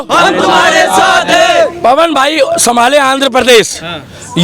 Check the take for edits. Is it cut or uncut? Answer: uncut